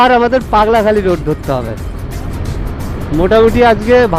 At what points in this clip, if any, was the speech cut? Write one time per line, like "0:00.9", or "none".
none